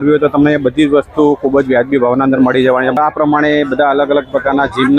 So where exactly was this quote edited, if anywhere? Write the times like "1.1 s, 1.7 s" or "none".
3.0 s

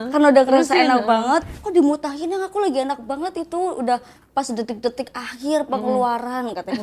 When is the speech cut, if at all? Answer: 1.6 s

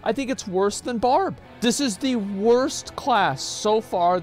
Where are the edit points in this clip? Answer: 1.4 s

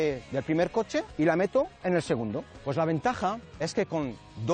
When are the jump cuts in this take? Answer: 1.1 s, 2.5 s

